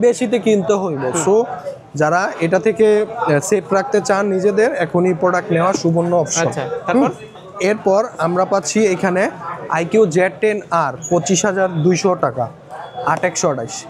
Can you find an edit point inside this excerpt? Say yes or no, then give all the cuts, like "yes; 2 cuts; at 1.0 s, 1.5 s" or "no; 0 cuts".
no; 0 cuts